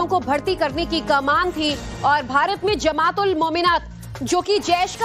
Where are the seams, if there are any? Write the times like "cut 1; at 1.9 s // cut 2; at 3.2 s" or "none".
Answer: none

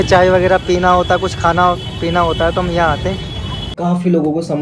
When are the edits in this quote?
cut 1; at 3.7 s

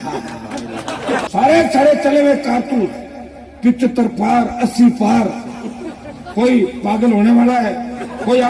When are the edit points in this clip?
cut 1; at 1.3 s

